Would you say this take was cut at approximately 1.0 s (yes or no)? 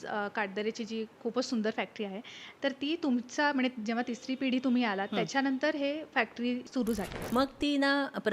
no